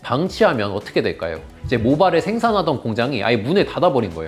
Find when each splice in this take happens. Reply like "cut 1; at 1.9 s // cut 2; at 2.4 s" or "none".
cut 1; at 1.5 s